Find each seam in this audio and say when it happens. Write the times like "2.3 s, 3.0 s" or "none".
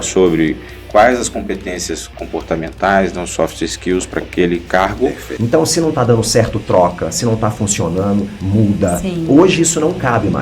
5.3 s

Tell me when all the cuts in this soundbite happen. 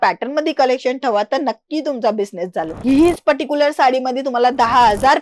2.7 s

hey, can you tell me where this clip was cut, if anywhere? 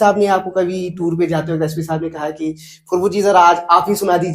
none

